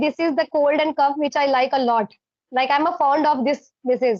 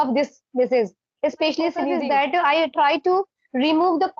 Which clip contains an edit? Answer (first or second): second